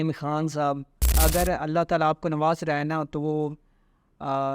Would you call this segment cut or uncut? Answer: cut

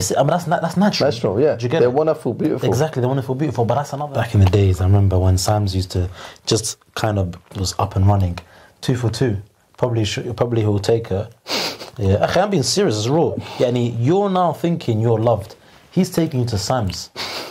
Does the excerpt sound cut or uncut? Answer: cut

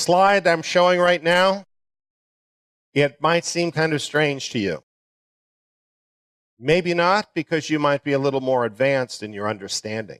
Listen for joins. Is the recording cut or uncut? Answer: cut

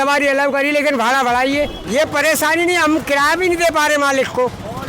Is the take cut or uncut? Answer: cut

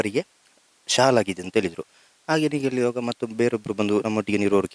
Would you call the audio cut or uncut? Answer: uncut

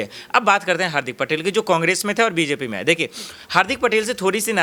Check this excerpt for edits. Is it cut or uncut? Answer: uncut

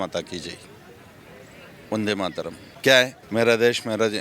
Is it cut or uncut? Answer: cut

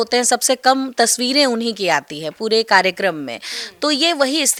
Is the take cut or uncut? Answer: uncut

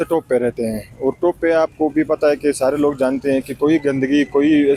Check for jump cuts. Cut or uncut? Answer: uncut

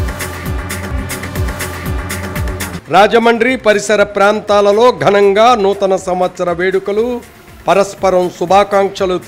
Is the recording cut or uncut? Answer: cut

